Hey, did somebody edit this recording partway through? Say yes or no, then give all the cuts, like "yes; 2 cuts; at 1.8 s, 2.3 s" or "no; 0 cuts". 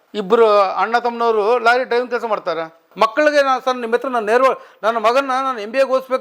yes; 1 cut; at 2.9 s